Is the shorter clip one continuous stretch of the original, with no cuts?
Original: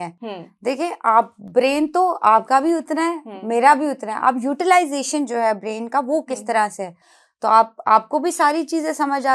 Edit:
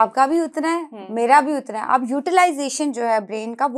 yes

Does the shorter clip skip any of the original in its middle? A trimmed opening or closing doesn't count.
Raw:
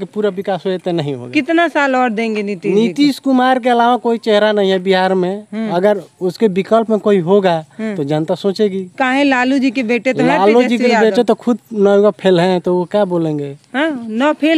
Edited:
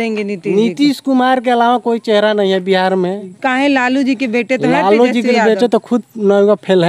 yes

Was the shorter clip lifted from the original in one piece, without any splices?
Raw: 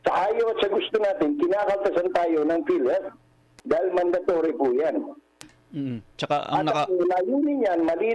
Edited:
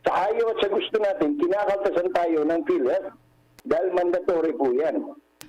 yes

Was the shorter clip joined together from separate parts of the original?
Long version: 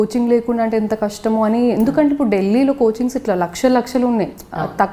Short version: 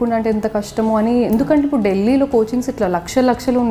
no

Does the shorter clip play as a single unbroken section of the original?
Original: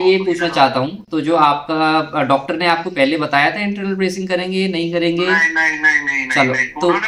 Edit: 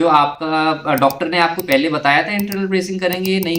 yes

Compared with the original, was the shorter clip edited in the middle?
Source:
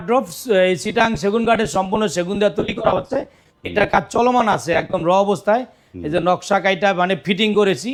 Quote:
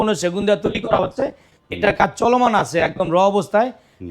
no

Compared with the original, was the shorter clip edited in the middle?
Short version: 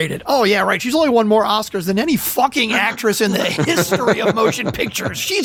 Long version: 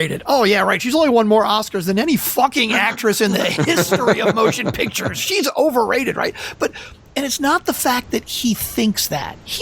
no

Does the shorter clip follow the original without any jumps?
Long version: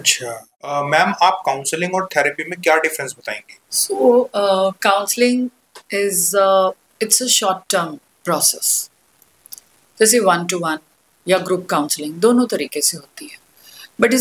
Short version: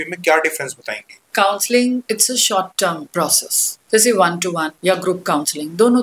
no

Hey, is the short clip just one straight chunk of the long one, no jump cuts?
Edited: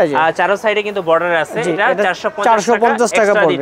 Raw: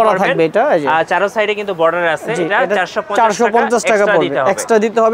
yes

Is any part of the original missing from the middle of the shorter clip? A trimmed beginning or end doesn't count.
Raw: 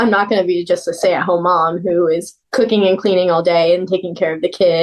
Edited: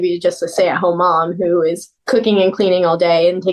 no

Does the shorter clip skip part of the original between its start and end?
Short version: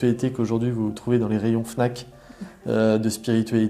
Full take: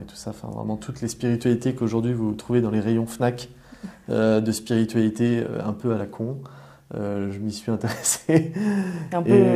no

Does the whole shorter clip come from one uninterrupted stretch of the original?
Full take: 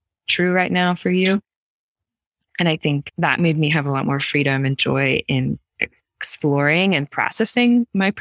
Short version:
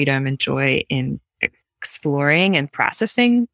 yes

